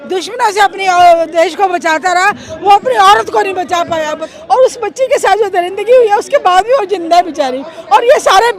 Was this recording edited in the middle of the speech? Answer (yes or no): yes